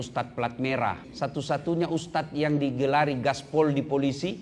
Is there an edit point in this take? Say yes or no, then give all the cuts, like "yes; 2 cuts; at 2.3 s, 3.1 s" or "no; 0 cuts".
yes; 1 cut; at 1.1 s